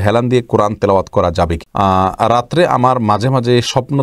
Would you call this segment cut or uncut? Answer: cut